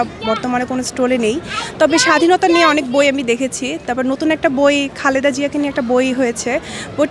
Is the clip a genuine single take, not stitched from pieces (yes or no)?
yes